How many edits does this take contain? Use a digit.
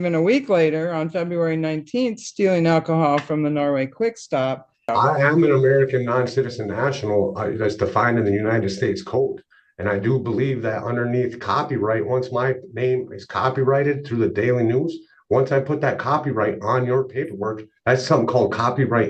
1